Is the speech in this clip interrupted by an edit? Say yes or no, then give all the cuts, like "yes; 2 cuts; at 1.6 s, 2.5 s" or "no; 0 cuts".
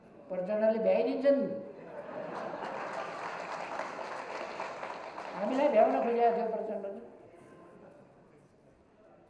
no; 0 cuts